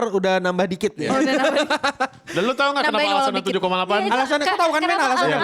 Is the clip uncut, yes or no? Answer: yes